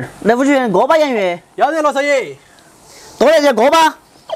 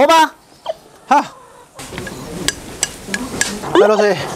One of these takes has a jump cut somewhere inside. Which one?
second; 2 cuts; at 1.7 s, 3.6 s

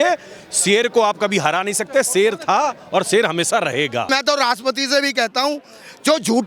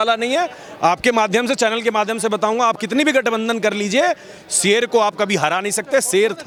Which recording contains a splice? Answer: first; 1 cut; at 4.1 s

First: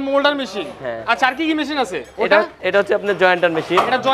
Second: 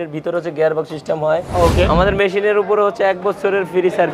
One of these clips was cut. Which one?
second; 1 cut; at 1.7 s

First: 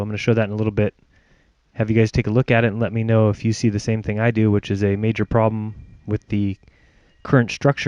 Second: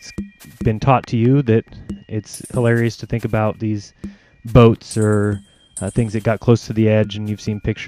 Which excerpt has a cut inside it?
second; 1 cut; at 2.3 s

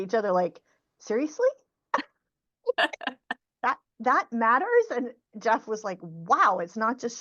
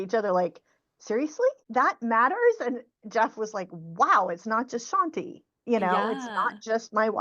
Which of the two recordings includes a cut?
second; 1 cut; at 1.6 s

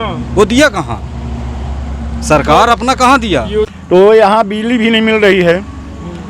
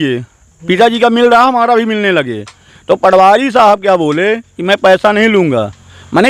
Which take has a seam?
first; 1 cut; at 3.7 s

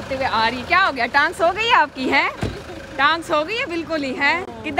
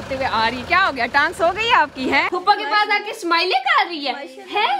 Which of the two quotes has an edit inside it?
second; 1 cut; at 2.3 s

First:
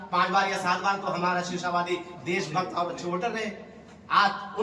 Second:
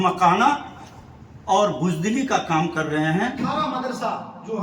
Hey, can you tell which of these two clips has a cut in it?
second; 1 cut; at 3.4 s

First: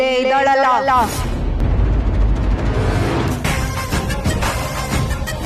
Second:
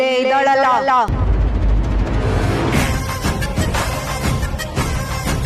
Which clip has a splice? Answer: second; 2 cuts; at 1.1 s, 2.8 s

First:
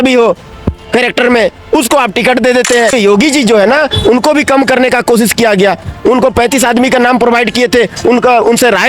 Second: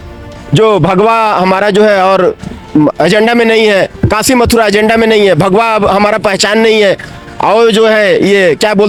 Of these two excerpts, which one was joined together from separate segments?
first; 1 cut; at 2.9 s

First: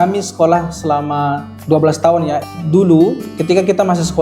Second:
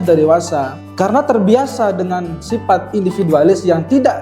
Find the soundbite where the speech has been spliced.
first; 2 cuts; at 1.5 s, 2.5 s

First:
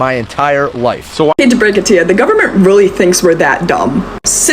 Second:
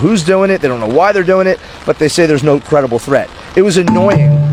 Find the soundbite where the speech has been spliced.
first; 1 cut; at 1.3 s

